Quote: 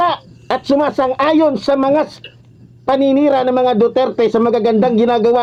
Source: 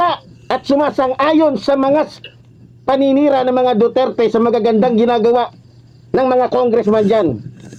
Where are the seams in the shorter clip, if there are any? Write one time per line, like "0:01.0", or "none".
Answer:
none